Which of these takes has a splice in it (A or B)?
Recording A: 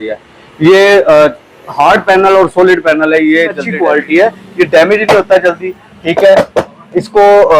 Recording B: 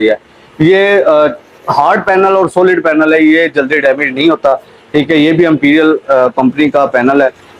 A